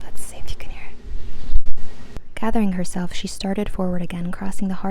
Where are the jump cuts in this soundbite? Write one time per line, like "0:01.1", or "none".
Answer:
0:02.2